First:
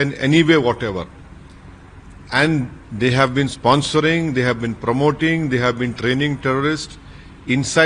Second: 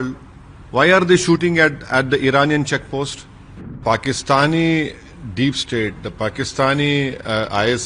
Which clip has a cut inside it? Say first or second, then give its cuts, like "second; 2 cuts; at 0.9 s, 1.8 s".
second; 1 cut; at 3.8 s